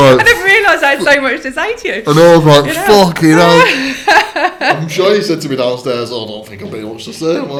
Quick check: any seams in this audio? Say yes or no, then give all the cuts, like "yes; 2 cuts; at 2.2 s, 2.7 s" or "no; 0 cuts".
no; 0 cuts